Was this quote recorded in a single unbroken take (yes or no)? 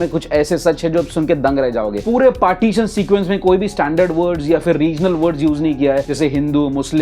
no